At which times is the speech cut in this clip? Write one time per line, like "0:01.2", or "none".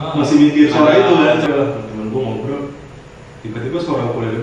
0:01.4